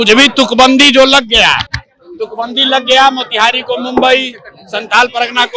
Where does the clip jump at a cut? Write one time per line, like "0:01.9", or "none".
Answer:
none